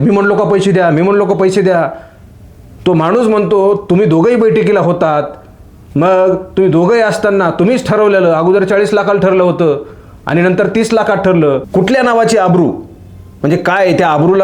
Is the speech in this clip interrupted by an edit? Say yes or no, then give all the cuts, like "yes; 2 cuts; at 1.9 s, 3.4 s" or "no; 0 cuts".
yes; 1 cut; at 11.7 s